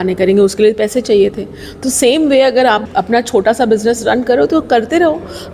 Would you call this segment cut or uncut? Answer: cut